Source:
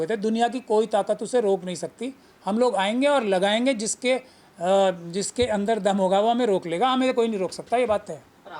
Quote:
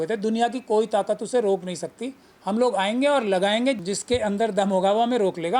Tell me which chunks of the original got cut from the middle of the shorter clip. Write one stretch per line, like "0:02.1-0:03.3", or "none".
0:03.9-0:05.1